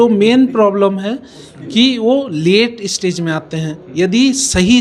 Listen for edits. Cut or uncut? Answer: uncut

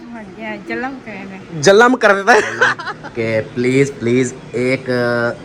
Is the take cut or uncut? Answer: cut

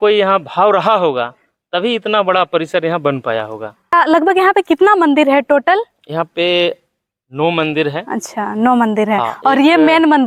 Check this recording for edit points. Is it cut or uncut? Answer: uncut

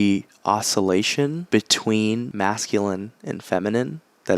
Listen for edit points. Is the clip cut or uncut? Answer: cut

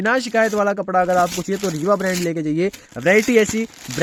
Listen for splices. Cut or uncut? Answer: uncut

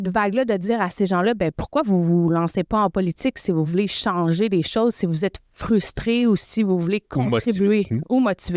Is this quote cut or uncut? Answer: uncut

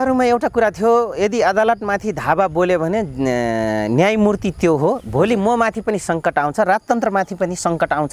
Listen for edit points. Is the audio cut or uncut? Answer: uncut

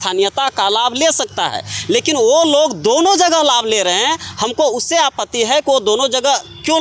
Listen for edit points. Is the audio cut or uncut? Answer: uncut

